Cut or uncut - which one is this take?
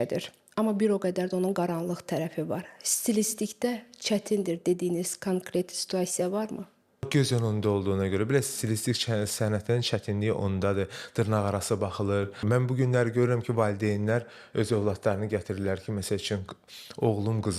cut